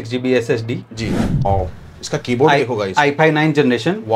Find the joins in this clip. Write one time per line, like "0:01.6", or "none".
0:01.5